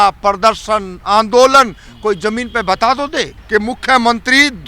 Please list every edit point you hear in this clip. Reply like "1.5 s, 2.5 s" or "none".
3.4 s